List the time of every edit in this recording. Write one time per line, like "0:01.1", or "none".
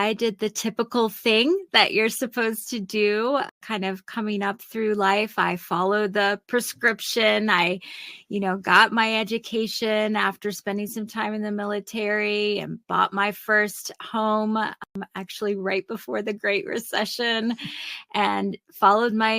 0:03.5
0:14.9